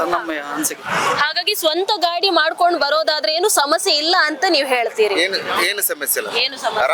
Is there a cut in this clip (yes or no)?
no